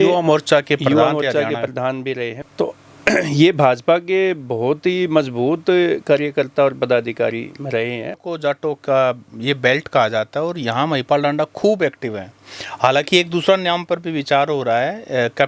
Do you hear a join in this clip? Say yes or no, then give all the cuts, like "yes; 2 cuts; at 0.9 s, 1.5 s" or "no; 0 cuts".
yes; 2 cuts; at 2.3 s, 8.2 s